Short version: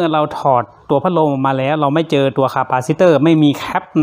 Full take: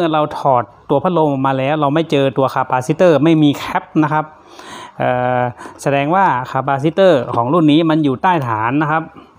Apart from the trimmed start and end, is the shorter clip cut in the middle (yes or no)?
no